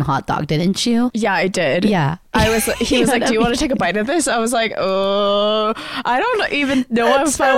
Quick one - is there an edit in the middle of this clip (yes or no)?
yes